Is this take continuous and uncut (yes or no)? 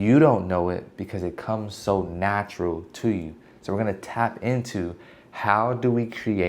yes